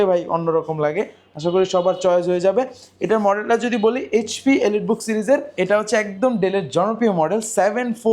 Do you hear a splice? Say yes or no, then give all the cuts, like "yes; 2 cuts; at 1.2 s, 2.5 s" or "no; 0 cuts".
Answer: yes; 1 cut; at 5.6 s